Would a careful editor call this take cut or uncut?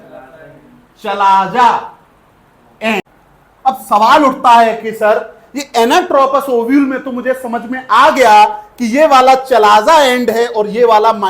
cut